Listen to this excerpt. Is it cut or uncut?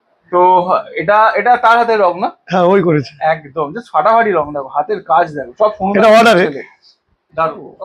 uncut